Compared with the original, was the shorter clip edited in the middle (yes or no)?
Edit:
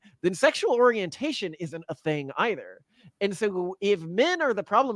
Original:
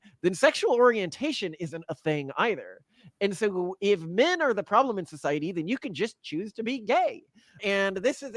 no